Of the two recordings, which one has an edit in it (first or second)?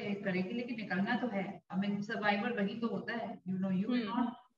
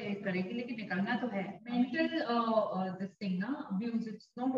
second